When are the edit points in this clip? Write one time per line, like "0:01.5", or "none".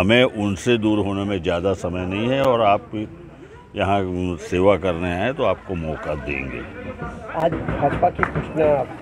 none